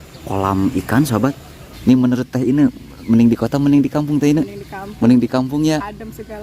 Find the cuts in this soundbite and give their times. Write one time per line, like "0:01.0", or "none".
0:01.7